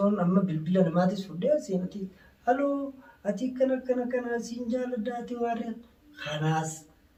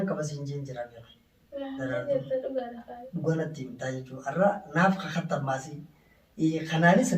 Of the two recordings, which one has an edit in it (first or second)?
second